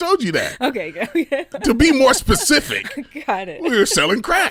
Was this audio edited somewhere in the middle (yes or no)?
no